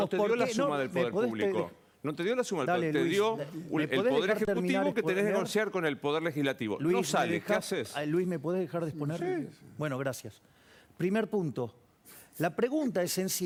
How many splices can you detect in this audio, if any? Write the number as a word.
zero